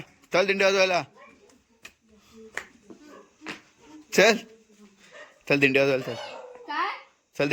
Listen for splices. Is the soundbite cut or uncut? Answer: uncut